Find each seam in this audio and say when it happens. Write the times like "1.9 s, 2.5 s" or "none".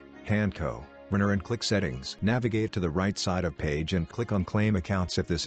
2.0 s